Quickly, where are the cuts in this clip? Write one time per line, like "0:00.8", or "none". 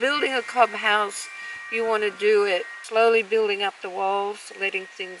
0:02.8